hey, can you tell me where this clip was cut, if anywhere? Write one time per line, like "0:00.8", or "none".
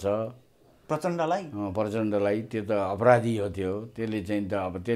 none

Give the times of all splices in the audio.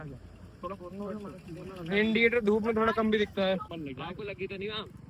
0:03.7

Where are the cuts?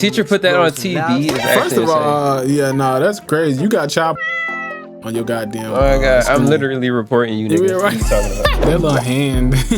0:08.6

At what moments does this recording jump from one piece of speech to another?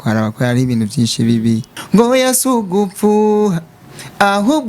0:01.7

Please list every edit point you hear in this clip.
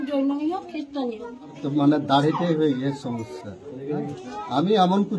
0:01.6

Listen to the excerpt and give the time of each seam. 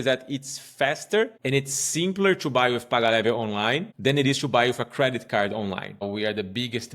0:01.4
0:03.9
0:06.0

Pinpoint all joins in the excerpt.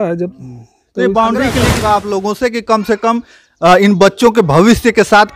0:01.7

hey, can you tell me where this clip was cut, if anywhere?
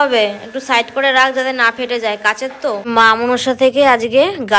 0:02.8

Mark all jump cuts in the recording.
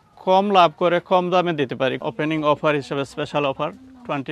0:02.0

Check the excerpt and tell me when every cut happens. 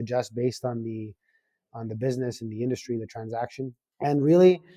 0:03.8

